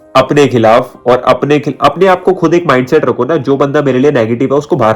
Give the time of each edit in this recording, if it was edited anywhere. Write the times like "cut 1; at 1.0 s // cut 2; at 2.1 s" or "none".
none